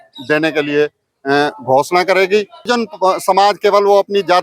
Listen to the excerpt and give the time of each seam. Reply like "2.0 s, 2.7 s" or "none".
2.7 s